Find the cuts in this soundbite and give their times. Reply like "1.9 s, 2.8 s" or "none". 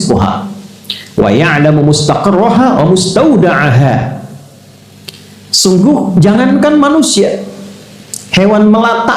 none